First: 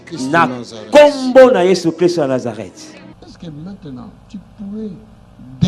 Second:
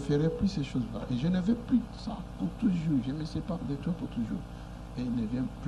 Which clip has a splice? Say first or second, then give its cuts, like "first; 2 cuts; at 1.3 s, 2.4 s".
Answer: first; 1 cut; at 3.1 s